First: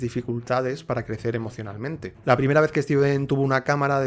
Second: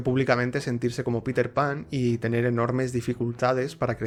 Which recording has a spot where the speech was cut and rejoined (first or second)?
first